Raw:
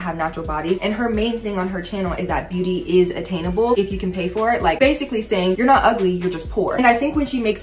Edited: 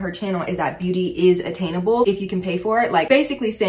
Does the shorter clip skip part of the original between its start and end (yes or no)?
no